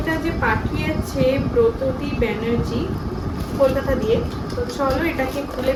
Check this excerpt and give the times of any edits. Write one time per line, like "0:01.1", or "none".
none